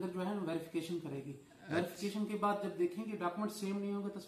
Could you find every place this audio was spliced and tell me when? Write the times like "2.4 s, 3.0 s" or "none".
none